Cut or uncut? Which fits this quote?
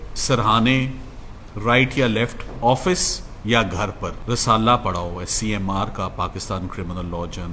cut